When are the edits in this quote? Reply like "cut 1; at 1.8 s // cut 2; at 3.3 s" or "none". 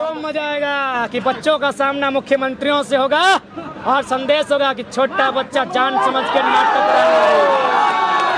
none